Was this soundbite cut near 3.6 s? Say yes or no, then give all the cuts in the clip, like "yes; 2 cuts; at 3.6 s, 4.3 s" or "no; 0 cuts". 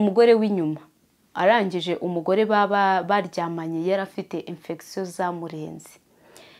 no; 1 cut; at 1.2 s